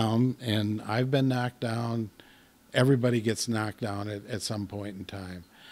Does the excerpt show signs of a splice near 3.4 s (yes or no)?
no